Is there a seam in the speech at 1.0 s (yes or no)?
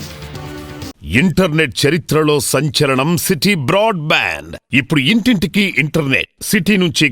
yes